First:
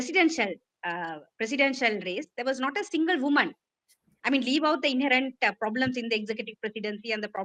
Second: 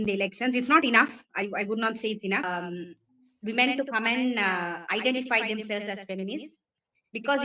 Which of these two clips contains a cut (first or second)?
second